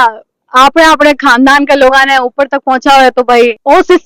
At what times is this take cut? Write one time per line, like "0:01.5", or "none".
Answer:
none